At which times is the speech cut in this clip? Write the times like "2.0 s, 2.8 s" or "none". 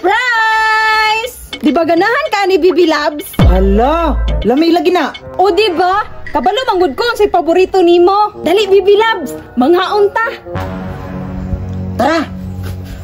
none